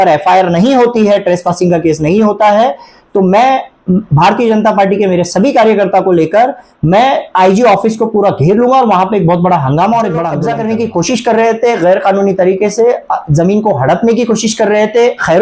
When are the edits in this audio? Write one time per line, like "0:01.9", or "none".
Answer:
0:10.4